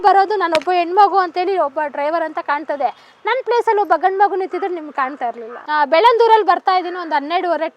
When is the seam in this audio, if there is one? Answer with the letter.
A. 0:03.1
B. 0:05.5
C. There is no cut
B